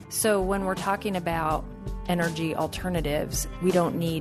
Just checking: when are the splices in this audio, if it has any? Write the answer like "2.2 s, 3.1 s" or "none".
none